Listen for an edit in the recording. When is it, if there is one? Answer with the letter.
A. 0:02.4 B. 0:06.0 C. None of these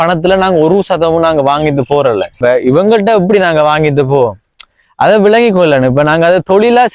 A